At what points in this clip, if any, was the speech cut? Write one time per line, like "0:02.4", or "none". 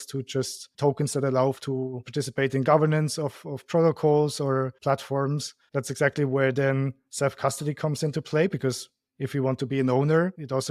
0:05.5